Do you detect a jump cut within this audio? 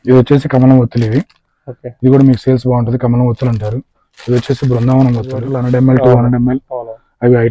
yes; 1 cut; at 5.5 s

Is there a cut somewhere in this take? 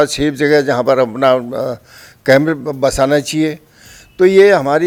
no; 0 cuts

